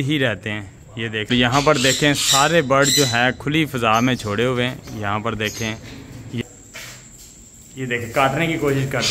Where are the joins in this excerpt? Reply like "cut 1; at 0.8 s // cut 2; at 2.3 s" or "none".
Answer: cut 1; at 1.2 s // cut 2; at 6.4 s